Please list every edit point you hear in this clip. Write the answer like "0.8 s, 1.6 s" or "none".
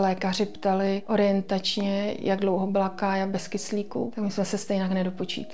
1.0 s, 4.1 s